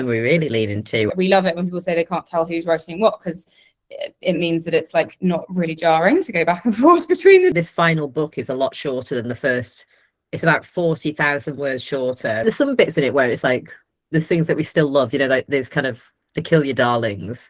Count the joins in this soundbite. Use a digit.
3